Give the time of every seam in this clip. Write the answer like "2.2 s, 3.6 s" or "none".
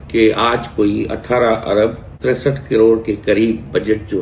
2.1 s